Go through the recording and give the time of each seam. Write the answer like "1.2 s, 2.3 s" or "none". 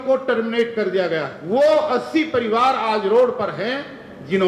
1.3 s